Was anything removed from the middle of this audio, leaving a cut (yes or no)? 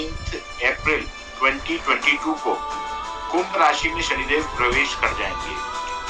no